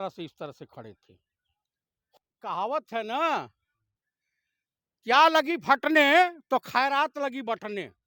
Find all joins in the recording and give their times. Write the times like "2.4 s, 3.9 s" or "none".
2.1 s